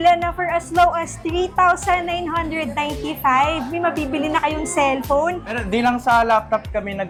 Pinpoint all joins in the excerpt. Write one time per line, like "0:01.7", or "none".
none